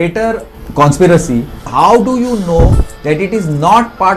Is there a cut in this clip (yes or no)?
yes